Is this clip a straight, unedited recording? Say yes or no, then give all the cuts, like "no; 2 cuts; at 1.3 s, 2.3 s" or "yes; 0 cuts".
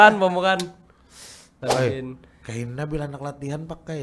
no; 1 cut; at 1.6 s